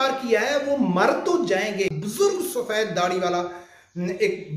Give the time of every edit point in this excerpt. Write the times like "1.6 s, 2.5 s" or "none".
1.9 s